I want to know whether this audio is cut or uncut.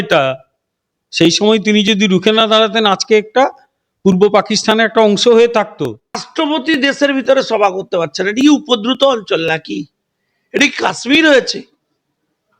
cut